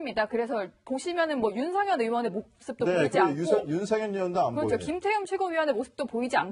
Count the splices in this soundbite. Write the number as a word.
zero